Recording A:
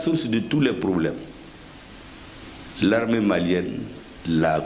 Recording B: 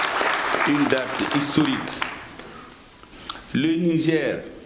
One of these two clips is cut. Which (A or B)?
B